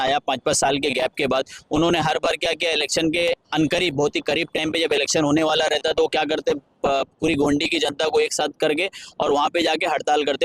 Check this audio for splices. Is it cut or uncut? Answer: uncut